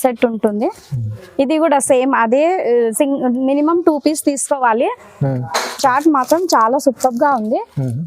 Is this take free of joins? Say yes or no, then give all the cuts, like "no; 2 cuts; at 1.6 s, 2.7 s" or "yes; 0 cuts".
no; 1 cut; at 5.6 s